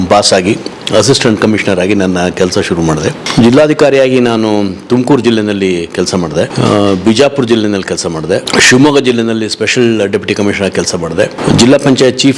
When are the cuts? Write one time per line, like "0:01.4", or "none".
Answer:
0:03.2
0:06.5
0:08.5
0:11.4